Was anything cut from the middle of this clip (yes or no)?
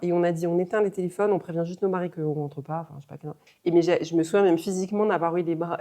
no